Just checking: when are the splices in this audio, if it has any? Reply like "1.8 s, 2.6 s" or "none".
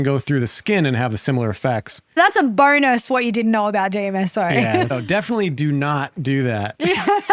2.2 s, 4.9 s